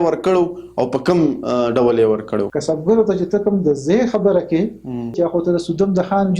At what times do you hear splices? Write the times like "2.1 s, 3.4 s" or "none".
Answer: 2.5 s, 5.1 s